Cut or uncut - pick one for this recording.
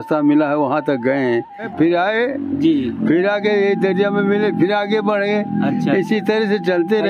cut